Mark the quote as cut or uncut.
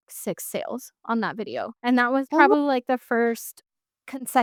uncut